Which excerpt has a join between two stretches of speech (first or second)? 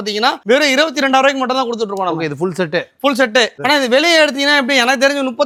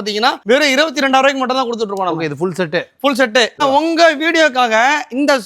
second